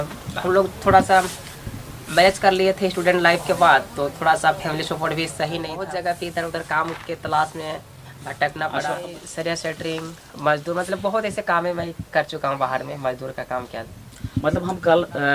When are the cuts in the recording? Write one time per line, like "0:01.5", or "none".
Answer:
0:05.7
0:09.1